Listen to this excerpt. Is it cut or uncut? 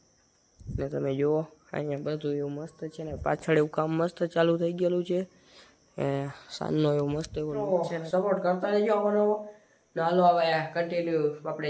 cut